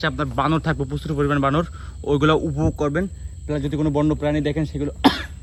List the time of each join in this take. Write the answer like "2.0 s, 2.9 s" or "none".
none